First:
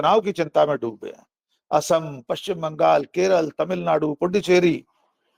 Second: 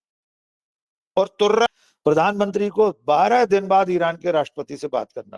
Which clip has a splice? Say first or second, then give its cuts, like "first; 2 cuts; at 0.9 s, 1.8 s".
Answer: second; 1 cut; at 1.7 s